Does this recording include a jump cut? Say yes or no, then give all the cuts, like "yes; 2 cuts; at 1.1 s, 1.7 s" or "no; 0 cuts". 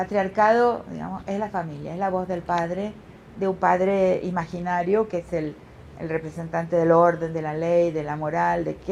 no; 0 cuts